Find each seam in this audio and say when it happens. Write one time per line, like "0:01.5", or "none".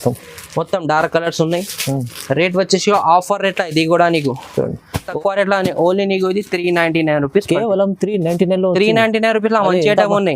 0:05.1